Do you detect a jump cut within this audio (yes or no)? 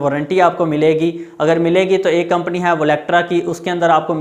no